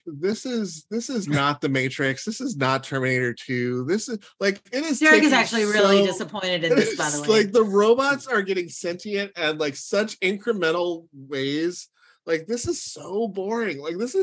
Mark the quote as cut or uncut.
uncut